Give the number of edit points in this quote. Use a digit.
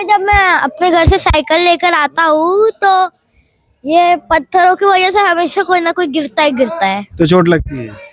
0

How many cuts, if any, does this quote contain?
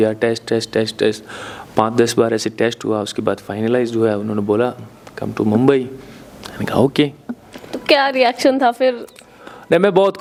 0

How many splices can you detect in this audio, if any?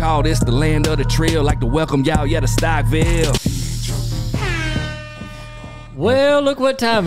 1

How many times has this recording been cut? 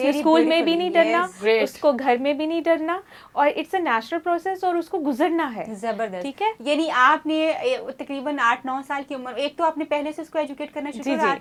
0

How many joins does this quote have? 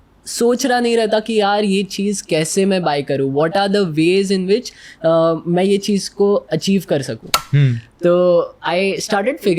1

